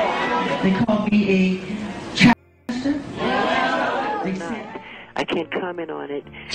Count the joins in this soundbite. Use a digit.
1